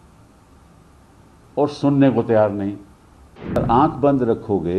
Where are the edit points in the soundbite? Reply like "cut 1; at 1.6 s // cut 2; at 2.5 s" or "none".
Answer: cut 1; at 3.6 s